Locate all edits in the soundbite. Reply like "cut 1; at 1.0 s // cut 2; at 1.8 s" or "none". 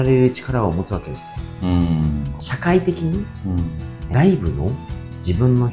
cut 1; at 2.3 s